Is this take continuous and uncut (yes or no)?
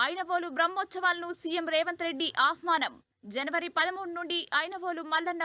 yes